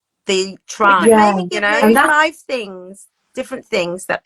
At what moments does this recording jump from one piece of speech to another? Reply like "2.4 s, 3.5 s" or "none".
2.1 s